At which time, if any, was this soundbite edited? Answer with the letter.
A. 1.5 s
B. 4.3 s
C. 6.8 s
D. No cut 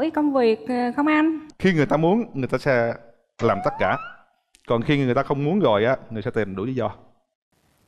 A